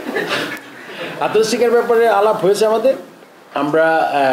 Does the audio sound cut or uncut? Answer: uncut